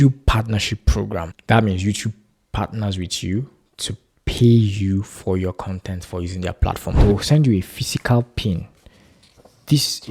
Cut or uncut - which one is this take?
cut